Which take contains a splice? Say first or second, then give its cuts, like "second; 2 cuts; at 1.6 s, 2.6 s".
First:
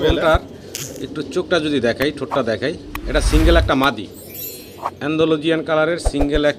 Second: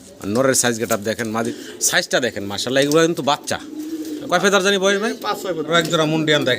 second; 2 cuts; at 1.5 s, 5.7 s